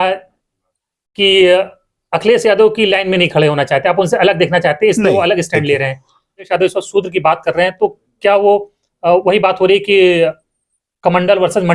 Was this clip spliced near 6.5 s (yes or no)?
yes